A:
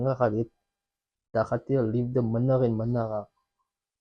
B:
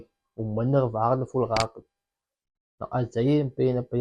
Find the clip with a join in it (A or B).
A